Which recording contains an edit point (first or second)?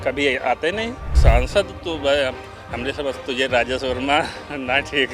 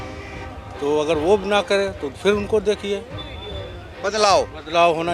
first